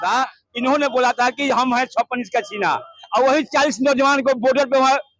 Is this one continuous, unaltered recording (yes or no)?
yes